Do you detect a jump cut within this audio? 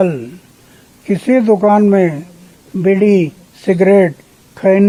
no; 0 cuts

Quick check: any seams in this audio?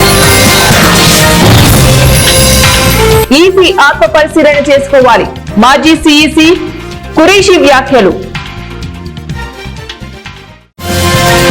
yes; 3 cuts; at 0.9 s, 3.3 s, 8.2 s

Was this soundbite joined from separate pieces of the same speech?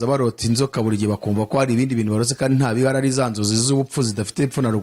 no; 0 cuts

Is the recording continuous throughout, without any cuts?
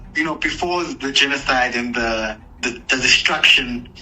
no; 1 cut; at 2.5 s

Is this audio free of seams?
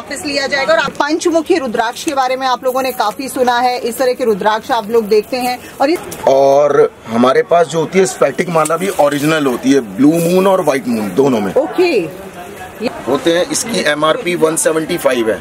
no; 3 cuts; at 0.9 s, 6.0 s, 12.8 s

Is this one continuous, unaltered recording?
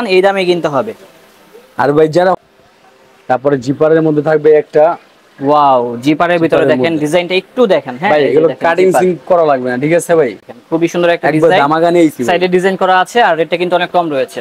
no; 2 cuts; at 2.4 s, 10.5 s

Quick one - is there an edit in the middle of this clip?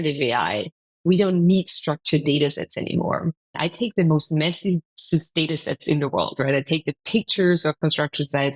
yes; 1 cut; at 3.6 s

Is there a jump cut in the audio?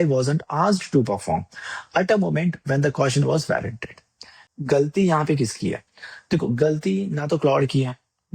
yes; 1 cut; at 4.4 s

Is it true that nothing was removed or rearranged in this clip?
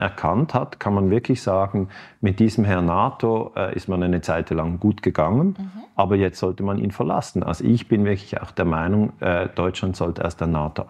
yes; 0 cuts

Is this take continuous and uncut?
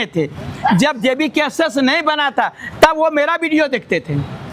yes; 0 cuts

